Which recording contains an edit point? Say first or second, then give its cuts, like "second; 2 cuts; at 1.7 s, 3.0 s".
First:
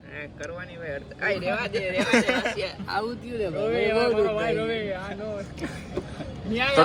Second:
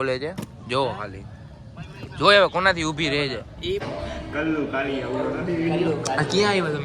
second; 1 cut; at 3.8 s